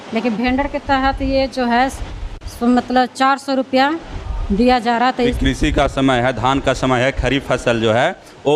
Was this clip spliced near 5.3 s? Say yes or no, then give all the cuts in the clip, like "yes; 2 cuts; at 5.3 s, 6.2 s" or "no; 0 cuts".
yes; 1 cut; at 5.3 s